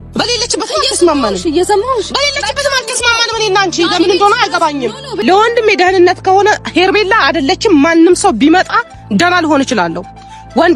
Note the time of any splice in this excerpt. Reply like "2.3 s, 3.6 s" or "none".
5.1 s